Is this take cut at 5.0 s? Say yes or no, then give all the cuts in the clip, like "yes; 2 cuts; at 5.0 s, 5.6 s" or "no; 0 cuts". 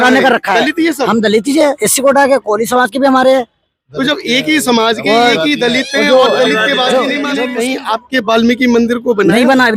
no; 1 cut; at 7.4 s